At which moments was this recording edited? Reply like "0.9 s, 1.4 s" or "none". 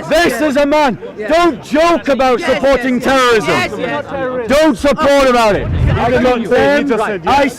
5.8 s

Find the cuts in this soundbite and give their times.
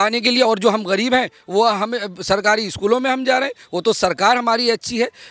none

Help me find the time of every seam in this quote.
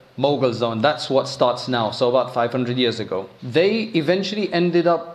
3.3 s

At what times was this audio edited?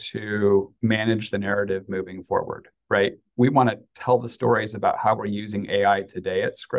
none

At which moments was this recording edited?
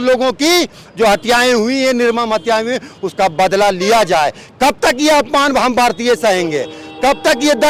none

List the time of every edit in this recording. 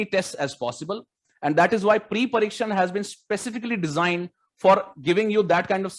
none

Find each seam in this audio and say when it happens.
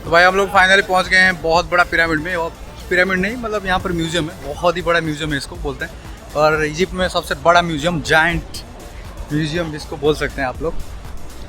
none

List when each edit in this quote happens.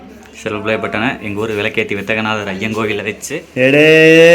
3.2 s

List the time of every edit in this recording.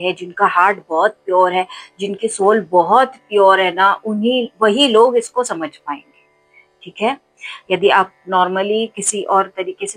none

